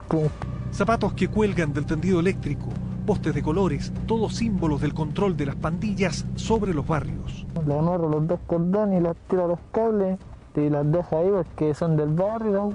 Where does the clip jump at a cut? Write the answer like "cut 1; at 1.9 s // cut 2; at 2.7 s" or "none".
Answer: cut 1; at 7.4 s